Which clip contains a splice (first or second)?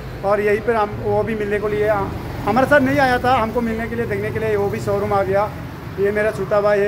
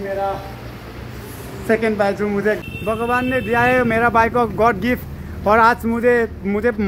second